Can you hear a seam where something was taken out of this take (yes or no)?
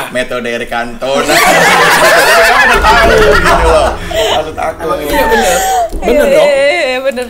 no